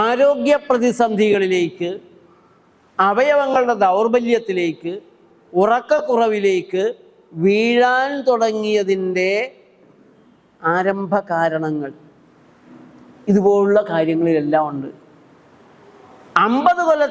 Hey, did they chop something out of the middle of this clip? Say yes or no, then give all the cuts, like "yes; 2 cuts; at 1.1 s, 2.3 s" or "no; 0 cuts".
no; 0 cuts